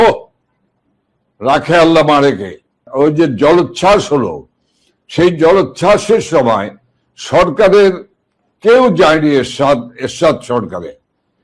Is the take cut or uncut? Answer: cut